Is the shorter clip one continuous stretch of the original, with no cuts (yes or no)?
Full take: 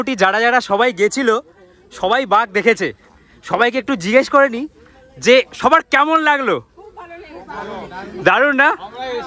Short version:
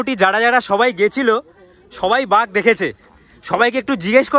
yes